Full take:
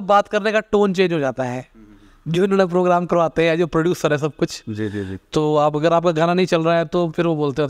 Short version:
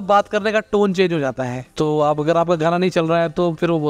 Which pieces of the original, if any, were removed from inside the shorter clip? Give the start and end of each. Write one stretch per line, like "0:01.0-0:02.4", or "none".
0:01.6-0:05.2

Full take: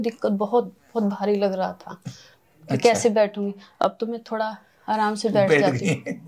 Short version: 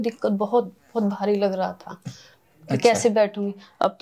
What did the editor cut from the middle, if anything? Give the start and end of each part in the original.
none

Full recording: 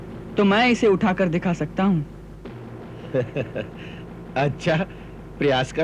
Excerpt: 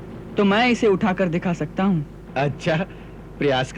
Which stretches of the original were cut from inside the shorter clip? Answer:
0:02.2-0:04.2

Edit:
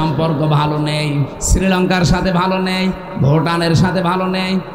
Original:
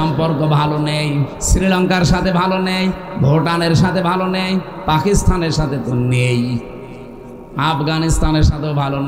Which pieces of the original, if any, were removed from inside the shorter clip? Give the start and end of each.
none

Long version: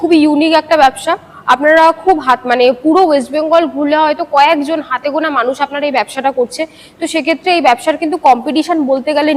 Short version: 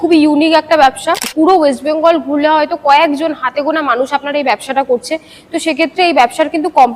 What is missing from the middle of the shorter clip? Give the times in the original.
0:01.3-0:02.8

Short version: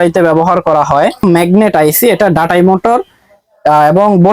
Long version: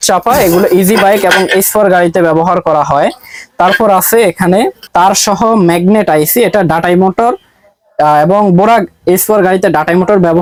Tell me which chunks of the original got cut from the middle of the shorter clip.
0:03.2-0:05.6

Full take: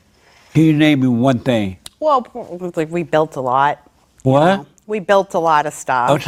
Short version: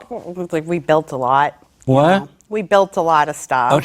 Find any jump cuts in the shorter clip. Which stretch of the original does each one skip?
0:03.9-0:04.1

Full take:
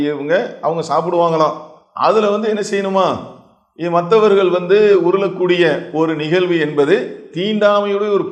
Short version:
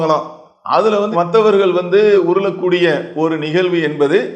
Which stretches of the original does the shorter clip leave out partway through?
0:02.4-0:03.9

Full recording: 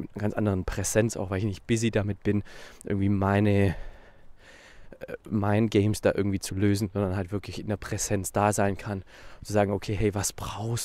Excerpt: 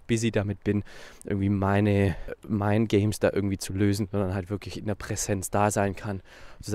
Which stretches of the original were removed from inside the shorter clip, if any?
0:03.9-0:05.1

